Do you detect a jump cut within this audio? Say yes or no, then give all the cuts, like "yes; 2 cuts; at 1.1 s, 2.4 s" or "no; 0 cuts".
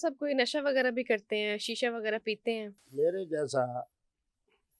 yes; 1 cut; at 2.8 s